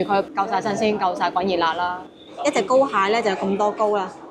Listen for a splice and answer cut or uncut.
cut